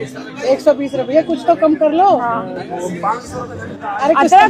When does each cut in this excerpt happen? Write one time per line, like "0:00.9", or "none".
none